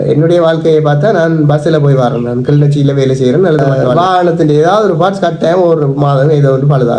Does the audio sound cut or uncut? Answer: cut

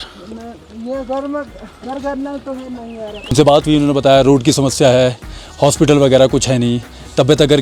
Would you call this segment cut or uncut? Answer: cut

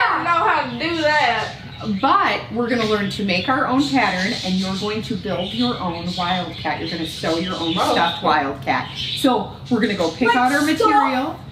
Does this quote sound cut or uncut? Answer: uncut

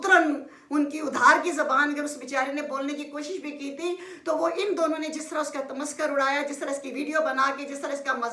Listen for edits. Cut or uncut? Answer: uncut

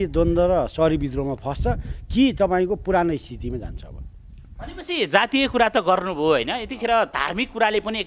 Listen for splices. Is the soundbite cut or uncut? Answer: uncut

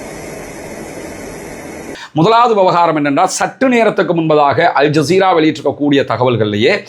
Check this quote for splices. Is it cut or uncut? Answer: cut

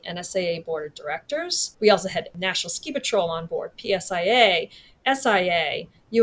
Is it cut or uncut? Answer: cut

